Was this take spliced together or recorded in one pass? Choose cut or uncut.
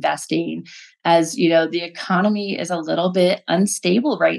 uncut